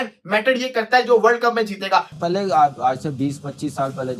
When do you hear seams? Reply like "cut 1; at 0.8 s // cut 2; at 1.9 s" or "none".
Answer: cut 1; at 2.1 s